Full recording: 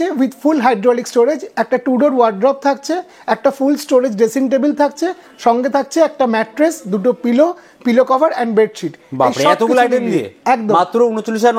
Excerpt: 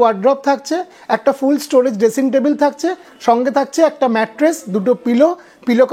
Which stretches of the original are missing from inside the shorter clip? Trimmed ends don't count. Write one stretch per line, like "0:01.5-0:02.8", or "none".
none